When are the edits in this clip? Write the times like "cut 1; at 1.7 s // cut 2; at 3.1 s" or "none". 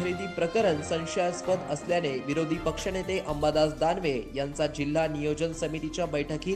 none

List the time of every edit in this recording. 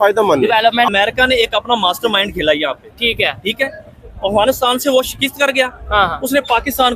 cut 1; at 0.9 s

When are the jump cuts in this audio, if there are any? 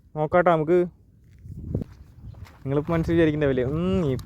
cut 1; at 1.8 s

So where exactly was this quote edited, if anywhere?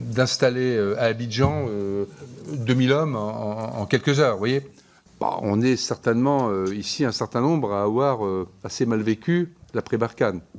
cut 1; at 4.9 s

